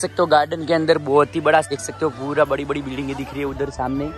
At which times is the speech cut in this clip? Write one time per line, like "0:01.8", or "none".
0:01.7

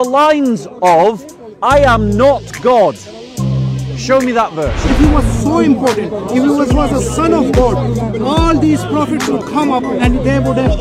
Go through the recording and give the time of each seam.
0:04.8

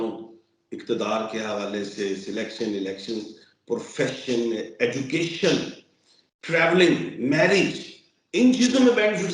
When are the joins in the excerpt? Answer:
none

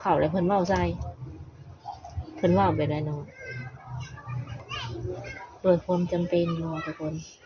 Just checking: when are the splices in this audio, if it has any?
0:04.7

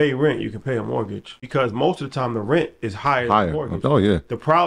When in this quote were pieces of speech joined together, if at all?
0:01.3

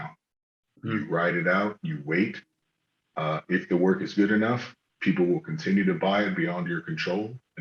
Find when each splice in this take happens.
none

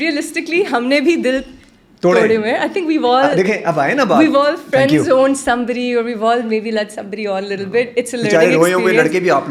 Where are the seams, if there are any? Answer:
none

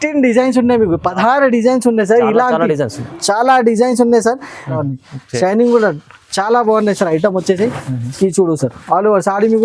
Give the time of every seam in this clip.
0:04.8

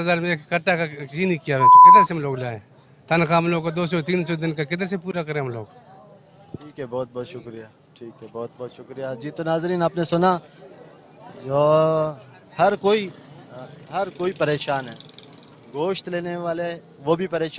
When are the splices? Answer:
none

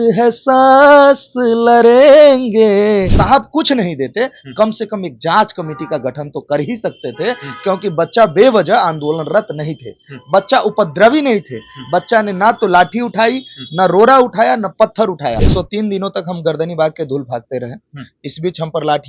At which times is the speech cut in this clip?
0:03.1
0:15.4

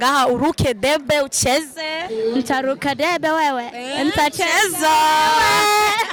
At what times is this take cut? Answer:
none

